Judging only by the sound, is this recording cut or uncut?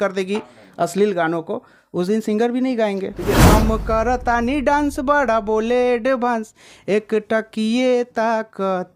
cut